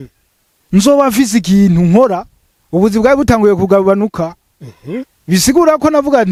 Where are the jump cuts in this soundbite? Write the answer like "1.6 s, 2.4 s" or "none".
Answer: none